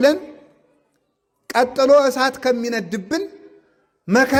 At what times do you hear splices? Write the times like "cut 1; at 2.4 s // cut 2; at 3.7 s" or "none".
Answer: none